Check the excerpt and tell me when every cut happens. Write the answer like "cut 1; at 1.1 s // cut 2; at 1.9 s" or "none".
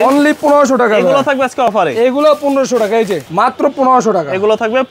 cut 1; at 3.2 s